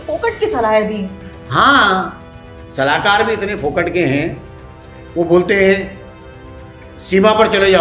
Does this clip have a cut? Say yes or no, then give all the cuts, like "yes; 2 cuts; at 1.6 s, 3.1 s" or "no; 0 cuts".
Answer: no; 0 cuts